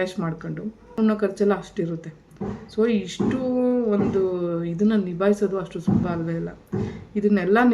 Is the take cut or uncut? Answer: cut